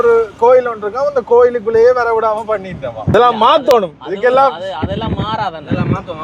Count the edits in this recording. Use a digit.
1